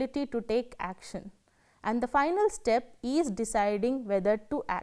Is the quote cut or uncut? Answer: uncut